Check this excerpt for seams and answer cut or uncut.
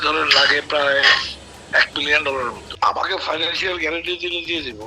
cut